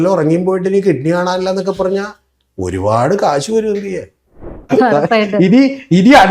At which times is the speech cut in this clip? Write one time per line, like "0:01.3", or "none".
0:04.6